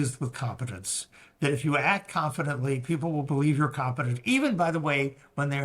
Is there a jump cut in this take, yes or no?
no